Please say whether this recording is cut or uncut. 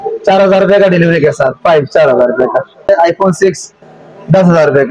cut